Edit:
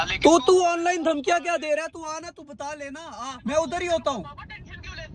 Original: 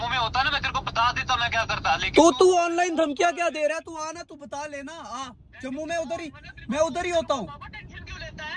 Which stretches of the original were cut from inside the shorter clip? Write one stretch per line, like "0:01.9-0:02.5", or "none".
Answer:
0:05.2-0:06.5